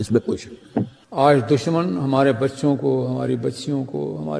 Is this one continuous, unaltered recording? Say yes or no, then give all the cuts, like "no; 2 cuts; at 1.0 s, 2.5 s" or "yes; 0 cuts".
no; 1 cut; at 1.0 s